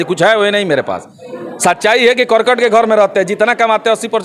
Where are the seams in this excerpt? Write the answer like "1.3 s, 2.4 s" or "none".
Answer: none